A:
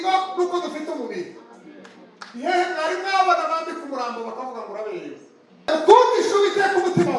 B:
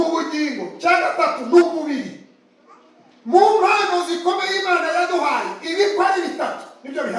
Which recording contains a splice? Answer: A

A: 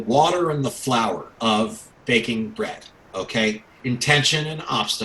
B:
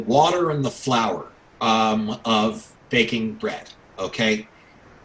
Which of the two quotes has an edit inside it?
A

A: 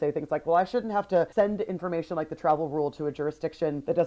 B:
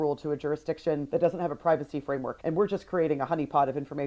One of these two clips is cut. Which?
A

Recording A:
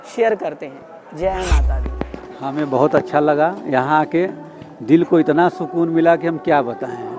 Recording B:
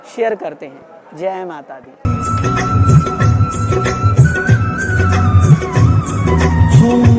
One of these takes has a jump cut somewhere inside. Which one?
A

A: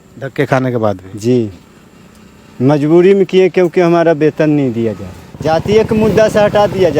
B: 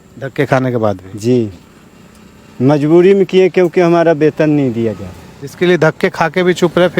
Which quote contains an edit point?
A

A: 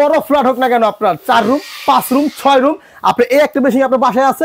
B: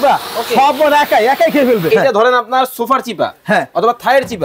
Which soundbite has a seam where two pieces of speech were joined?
B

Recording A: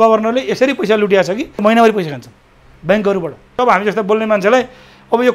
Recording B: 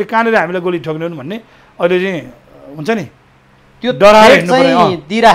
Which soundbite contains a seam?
A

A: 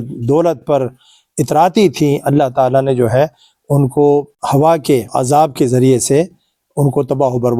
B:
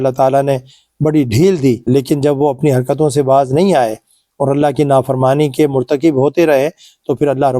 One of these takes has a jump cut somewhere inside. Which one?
B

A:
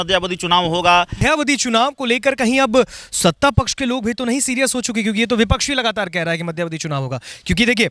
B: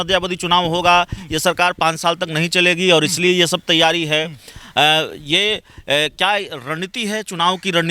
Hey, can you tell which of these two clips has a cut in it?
A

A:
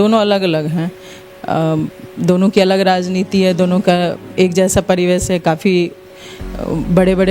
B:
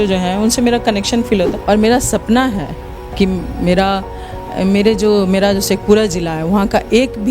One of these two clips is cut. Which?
B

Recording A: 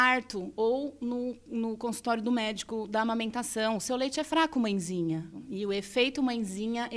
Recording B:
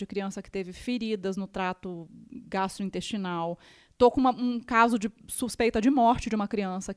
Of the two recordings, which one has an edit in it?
A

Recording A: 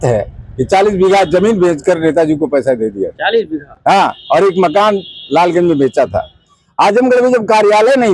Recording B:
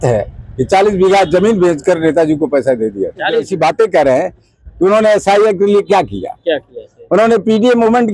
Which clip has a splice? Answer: B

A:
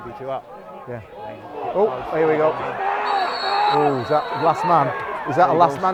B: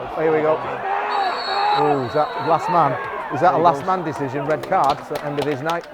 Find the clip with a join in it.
B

